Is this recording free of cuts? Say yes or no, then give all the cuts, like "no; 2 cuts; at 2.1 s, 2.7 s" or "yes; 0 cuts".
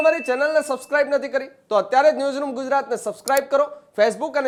yes; 0 cuts